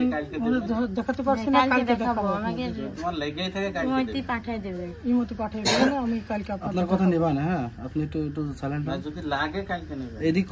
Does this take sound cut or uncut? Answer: uncut